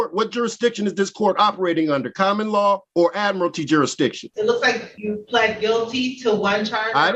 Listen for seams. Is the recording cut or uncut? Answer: cut